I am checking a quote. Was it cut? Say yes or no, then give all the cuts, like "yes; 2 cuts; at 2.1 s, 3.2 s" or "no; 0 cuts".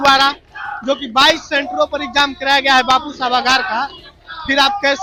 no; 0 cuts